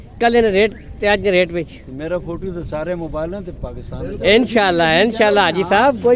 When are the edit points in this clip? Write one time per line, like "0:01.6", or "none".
none